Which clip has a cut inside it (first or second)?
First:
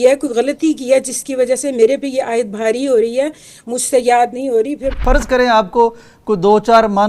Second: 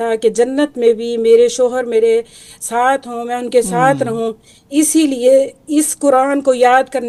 first